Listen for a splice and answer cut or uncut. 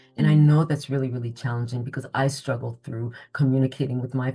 uncut